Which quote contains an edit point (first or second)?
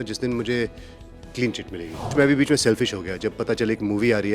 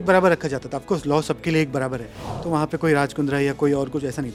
first